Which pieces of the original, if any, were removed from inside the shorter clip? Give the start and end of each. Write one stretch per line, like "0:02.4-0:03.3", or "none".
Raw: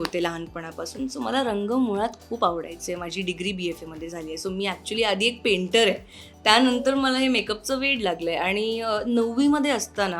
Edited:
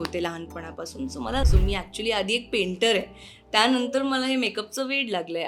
0:01.4-0:04.4